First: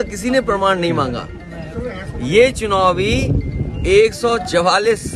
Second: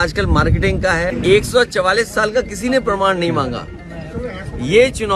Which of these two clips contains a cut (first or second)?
second